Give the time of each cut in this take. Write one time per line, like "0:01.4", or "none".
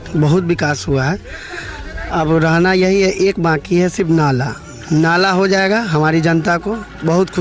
none